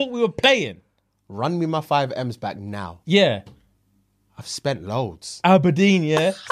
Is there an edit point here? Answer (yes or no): no